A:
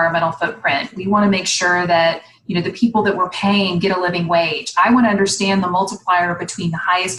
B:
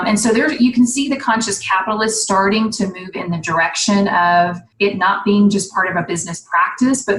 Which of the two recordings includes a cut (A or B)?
B